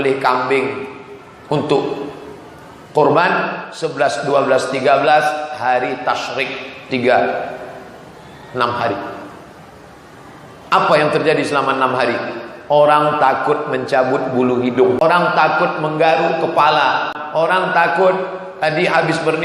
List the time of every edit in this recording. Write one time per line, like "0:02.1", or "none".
0:15.0
0:17.1